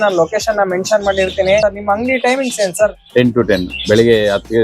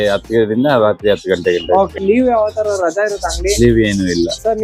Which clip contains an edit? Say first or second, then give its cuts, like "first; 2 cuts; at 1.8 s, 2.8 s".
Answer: first; 1 cut; at 1.6 s